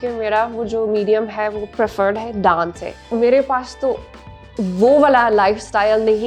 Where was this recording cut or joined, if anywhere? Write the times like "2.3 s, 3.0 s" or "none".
3.1 s